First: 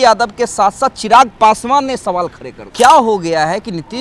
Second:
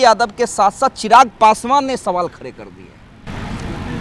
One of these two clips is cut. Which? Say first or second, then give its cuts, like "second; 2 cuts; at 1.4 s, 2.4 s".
first; 1 cut; at 2.7 s